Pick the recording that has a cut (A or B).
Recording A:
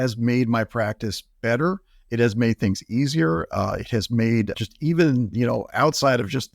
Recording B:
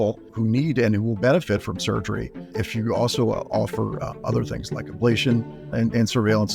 A